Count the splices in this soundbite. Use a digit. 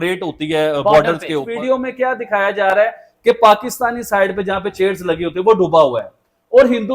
1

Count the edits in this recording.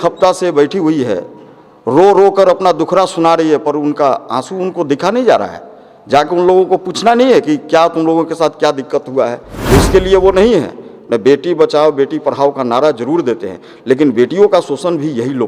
1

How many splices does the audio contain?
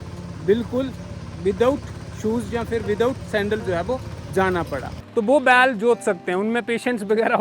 1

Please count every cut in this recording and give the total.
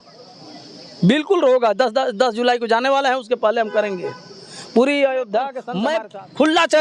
1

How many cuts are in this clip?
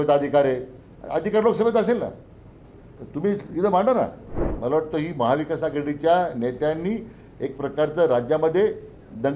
1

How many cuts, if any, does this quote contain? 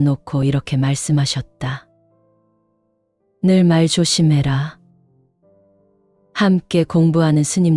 2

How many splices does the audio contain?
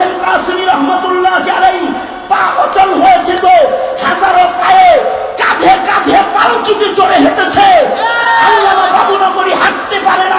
0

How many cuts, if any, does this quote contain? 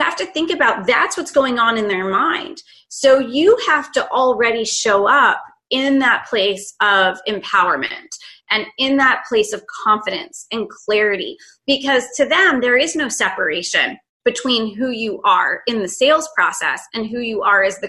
0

